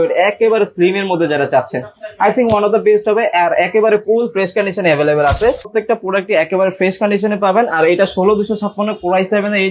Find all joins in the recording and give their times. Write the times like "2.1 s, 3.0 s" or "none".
5.7 s